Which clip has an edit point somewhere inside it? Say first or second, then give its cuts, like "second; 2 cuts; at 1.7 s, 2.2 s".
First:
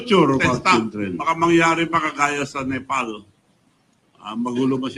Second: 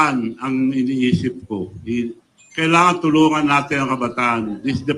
first; 1 cut; at 1.2 s